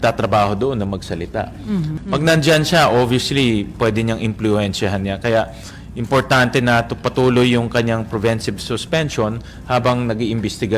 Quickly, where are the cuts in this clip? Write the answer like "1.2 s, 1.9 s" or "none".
2.0 s